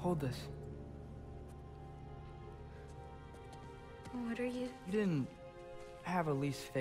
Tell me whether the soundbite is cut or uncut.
uncut